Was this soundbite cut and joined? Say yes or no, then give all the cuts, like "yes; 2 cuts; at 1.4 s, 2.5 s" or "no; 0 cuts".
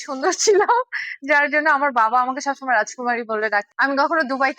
yes; 1 cut; at 3.7 s